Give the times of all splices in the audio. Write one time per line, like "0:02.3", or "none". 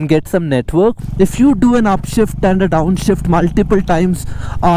0:01.0